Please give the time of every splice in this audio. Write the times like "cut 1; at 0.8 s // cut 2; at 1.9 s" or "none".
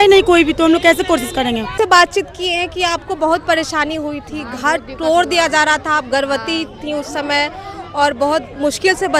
cut 1; at 1.8 s